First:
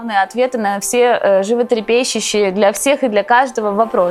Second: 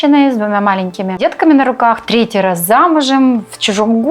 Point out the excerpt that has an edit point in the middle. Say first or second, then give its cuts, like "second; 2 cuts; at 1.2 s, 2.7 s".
second; 1 cut; at 1.1 s